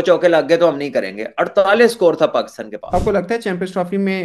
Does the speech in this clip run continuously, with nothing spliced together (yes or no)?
no